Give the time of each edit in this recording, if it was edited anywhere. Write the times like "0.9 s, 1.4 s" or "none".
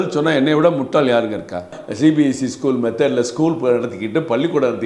1.8 s